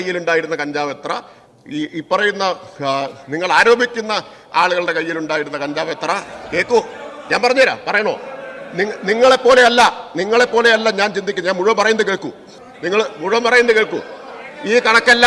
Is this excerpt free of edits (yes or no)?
yes